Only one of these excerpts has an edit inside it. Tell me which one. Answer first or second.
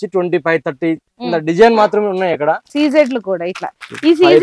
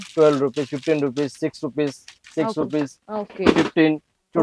first